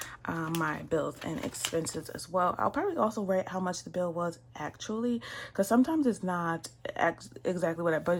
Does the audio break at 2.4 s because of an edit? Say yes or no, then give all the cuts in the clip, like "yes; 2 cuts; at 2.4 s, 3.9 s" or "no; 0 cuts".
no; 0 cuts